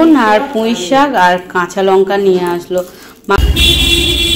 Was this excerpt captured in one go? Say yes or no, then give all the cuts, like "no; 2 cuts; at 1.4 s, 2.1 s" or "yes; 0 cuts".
no; 1 cut; at 3.4 s